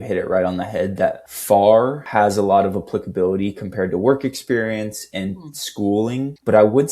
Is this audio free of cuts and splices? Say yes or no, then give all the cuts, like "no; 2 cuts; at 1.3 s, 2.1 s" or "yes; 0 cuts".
no; 2 cuts; at 1.3 s, 2.0 s